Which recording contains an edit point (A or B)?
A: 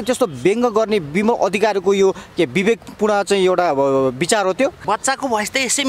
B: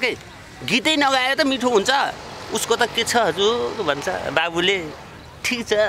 A